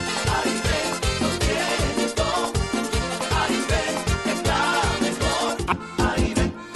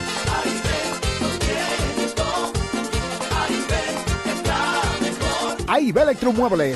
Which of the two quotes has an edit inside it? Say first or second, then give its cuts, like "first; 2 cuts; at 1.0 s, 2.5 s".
first; 1 cut; at 5.7 s